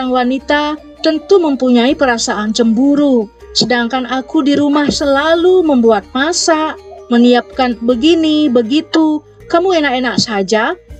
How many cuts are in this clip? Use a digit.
0